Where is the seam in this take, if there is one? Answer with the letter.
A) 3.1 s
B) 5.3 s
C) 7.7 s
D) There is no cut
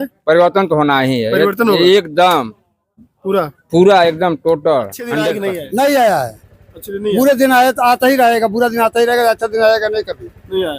B